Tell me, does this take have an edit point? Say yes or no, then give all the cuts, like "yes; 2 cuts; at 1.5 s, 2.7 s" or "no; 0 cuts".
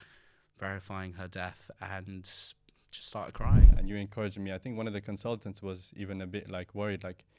yes; 1 cut; at 3.7 s